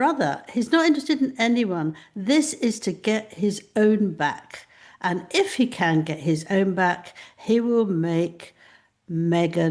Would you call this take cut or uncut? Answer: uncut